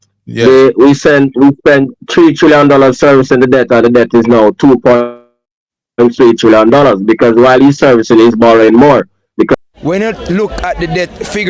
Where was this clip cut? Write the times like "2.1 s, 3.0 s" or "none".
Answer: 9.6 s